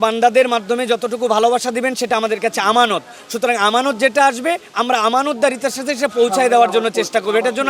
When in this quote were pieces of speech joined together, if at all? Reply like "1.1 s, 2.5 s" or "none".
none